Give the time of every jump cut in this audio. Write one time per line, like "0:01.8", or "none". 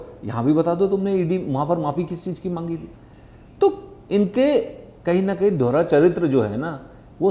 none